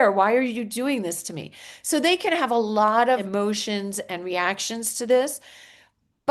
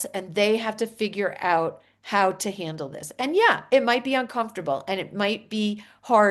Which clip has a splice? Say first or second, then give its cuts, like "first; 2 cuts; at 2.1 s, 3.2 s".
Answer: first; 1 cut; at 3.2 s